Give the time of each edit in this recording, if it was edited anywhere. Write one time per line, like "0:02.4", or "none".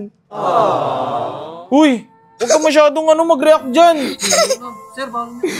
none